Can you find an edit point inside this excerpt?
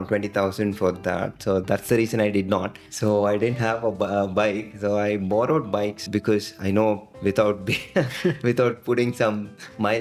yes; 3 cuts; at 2.8 s, 6.0 s, 7.1 s

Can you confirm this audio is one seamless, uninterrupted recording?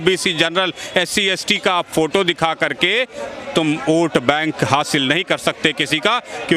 yes; 0 cuts

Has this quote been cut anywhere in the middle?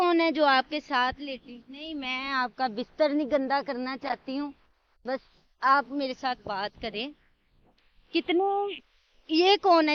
no; 0 cuts

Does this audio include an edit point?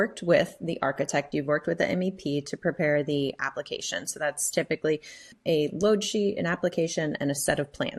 no; 0 cuts

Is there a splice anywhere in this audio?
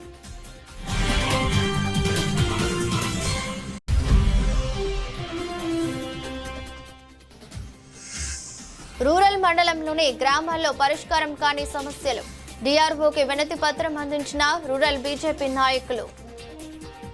yes; 4 cuts; at 3.8 s, 7.8 s, 9.0 s, 16.2 s

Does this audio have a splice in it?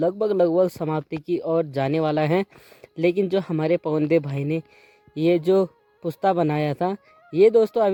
no; 0 cuts

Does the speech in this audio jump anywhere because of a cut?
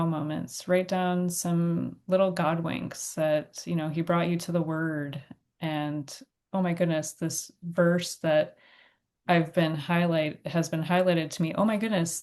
no; 0 cuts

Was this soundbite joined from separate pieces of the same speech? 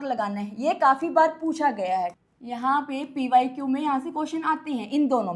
yes; 1 cut; at 2.2 s

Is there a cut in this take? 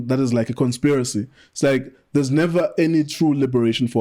no; 0 cuts

